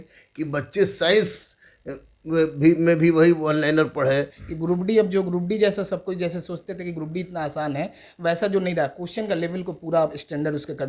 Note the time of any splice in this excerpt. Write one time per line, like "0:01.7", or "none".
0:04.4